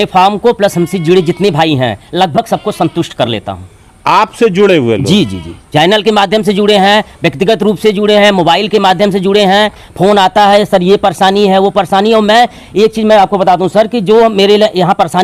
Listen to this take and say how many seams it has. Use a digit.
0